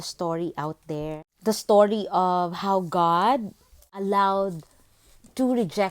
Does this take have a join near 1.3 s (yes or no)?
yes